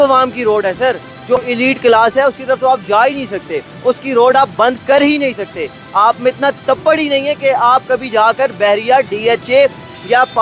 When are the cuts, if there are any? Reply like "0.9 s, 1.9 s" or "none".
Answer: 1.4 s